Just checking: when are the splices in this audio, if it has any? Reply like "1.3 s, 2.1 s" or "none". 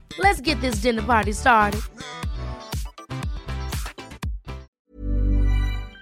4.7 s

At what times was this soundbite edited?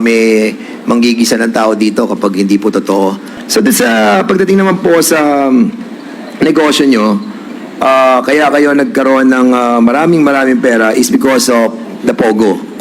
3.3 s

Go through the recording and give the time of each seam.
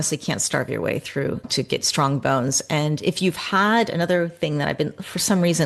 1.4 s

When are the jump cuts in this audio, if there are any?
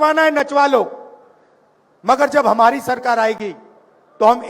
none

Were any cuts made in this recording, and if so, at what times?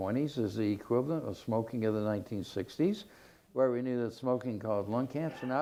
none

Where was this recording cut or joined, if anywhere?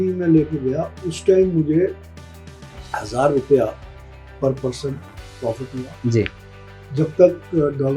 none

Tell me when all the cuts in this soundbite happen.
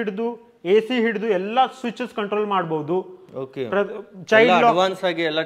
none

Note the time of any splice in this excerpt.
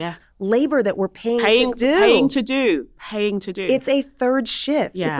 none

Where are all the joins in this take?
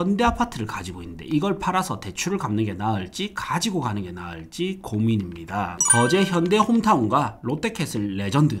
5.8 s

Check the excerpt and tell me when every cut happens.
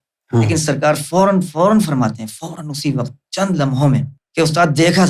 4.2 s

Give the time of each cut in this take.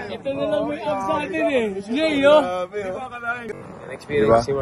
3.5 s

